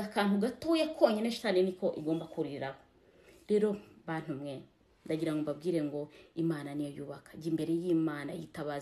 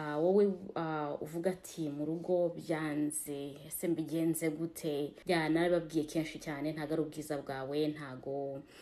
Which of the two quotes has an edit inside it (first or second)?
second